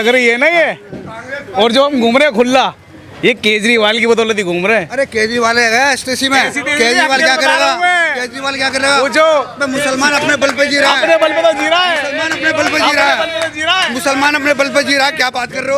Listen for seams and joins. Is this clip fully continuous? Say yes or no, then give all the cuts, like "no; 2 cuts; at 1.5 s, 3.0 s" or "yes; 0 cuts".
yes; 0 cuts